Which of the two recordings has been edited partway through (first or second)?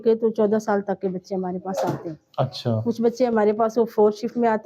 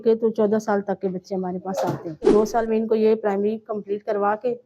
second